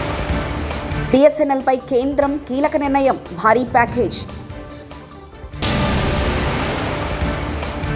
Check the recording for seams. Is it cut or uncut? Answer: cut